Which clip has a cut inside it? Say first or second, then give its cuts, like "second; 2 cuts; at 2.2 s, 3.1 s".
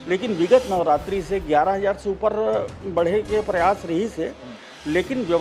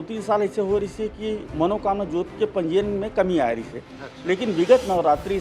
second; 1 cut; at 1.5 s